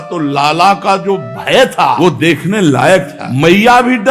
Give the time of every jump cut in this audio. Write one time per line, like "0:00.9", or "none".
0:02.0
0:03.2